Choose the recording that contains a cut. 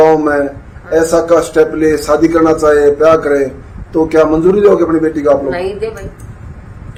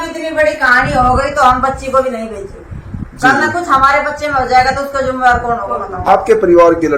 second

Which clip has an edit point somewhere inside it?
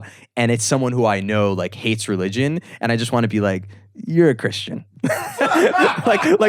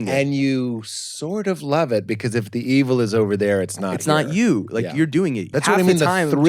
second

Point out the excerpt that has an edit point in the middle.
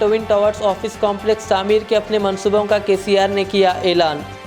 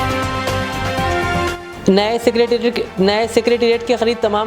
second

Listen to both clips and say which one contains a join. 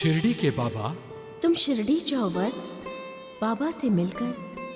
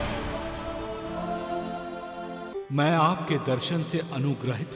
second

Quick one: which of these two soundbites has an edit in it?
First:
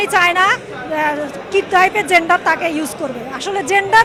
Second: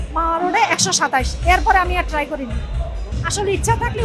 second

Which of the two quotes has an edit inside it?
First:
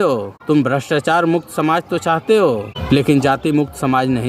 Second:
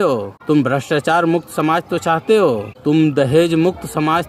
first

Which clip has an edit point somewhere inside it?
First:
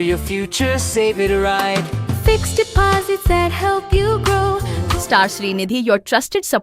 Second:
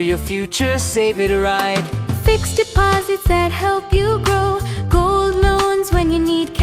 first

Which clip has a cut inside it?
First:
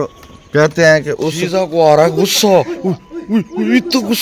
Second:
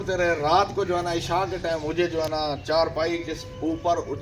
first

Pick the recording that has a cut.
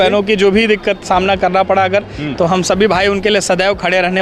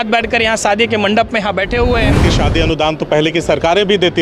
second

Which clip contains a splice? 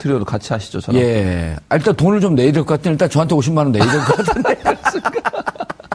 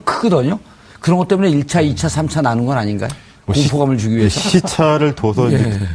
first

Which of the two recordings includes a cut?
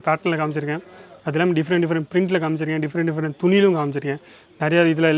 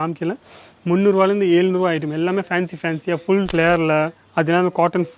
second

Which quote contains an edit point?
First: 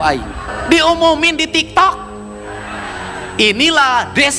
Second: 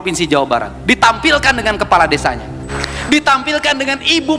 second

